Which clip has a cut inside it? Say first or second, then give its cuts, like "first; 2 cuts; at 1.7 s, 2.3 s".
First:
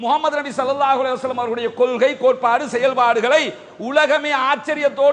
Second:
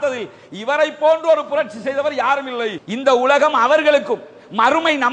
second; 1 cut; at 2.8 s